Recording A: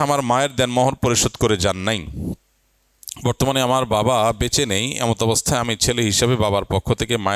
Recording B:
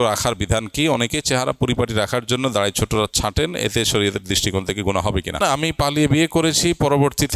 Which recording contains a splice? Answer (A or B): B